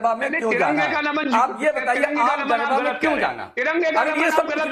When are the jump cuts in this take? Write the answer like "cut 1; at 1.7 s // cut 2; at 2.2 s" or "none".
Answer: cut 1; at 2.0 s